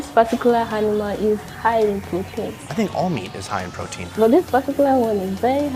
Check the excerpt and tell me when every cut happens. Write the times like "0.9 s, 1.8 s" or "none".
2.6 s, 4.1 s